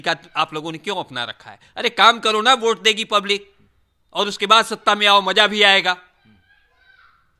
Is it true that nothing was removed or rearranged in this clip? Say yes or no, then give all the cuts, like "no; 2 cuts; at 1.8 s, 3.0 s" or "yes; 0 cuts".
yes; 0 cuts